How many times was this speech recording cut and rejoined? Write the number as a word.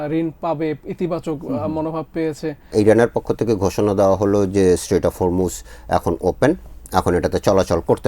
one